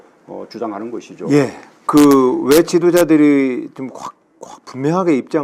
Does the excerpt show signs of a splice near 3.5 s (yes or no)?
yes